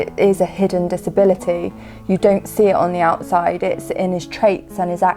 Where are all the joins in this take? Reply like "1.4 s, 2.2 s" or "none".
none